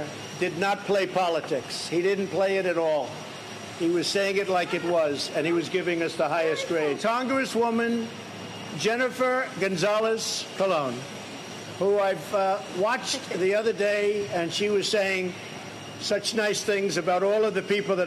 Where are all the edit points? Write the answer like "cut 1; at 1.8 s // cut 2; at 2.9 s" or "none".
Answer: cut 1; at 5.7 s